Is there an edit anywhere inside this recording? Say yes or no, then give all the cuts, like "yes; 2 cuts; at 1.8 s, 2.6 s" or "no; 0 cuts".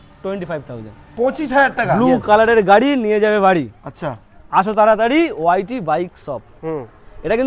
yes; 1 cut; at 2.0 s